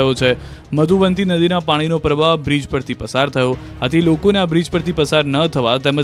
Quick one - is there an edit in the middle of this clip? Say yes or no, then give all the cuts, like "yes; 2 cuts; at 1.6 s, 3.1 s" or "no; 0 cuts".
no; 0 cuts